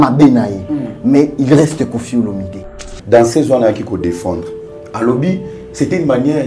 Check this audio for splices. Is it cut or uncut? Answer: cut